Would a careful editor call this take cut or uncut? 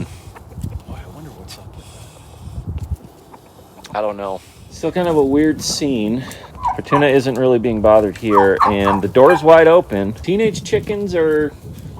uncut